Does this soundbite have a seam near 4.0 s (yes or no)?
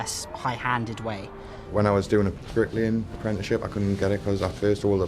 no